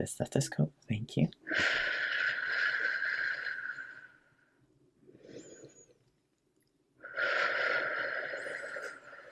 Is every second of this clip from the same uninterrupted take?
yes; 0 cuts

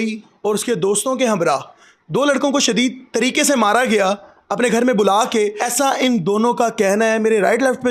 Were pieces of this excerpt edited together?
yes; 1 cut; at 5.6 s

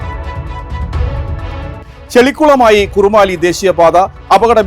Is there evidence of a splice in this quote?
yes; 1 cut; at 2.0 s

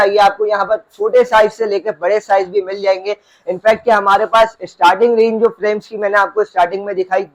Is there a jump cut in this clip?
no; 0 cuts

